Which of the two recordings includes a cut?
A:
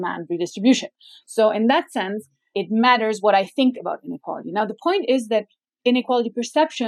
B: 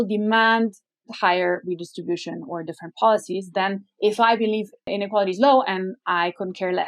B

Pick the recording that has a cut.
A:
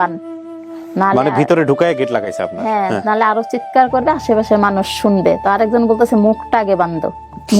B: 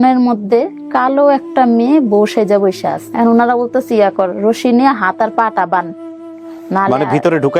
B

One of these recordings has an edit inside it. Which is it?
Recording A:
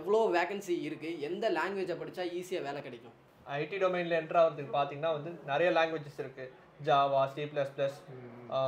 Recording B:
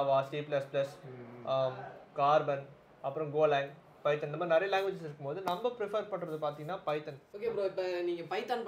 B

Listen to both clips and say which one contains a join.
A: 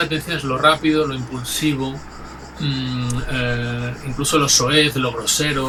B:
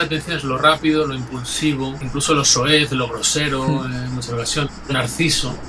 B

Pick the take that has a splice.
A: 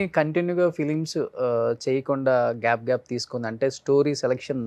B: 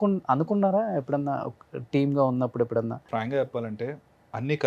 B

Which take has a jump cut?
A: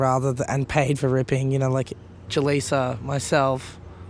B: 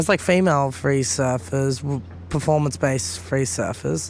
A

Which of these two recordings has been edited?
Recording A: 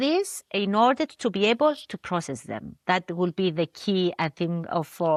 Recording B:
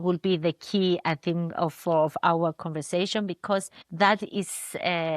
B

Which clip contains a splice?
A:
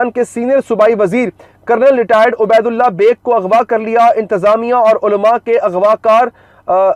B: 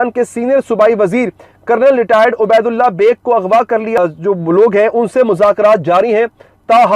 B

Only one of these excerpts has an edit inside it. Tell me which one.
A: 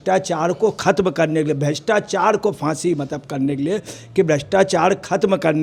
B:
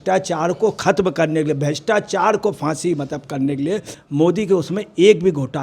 B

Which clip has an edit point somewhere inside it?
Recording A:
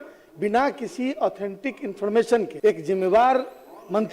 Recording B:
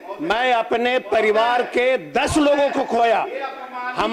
A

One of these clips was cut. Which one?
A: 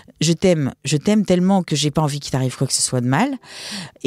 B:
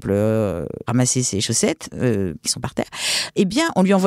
B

